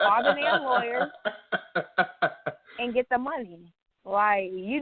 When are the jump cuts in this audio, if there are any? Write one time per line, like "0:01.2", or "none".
none